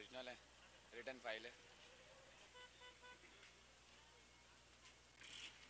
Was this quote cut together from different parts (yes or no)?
yes